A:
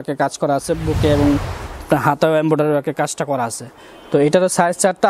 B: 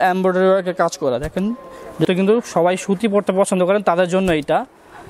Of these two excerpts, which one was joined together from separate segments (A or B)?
B